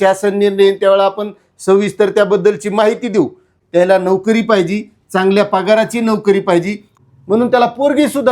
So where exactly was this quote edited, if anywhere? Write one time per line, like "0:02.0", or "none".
0:03.5
0:06.9